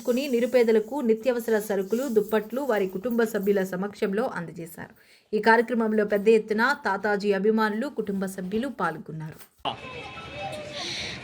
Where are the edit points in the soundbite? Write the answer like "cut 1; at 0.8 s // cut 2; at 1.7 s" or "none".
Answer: cut 1; at 9.6 s

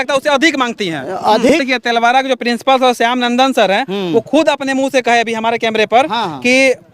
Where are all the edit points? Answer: cut 1; at 1.6 s

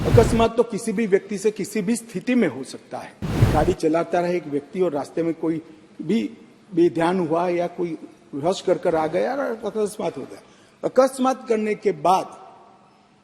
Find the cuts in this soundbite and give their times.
cut 1; at 3.5 s

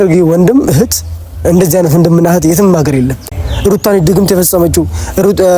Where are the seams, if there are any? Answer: cut 1; at 3.5 s

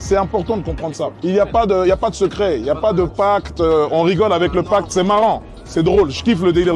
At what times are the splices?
none

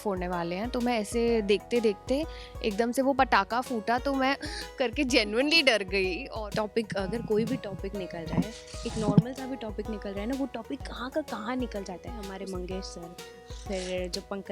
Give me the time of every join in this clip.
cut 1; at 6.2 s // cut 2; at 12.2 s

